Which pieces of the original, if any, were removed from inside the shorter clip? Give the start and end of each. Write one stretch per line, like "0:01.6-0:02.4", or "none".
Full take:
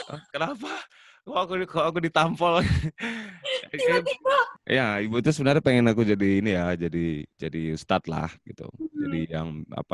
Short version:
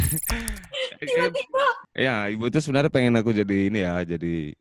none